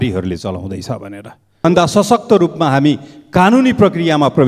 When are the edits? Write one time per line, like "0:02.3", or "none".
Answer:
0:01.6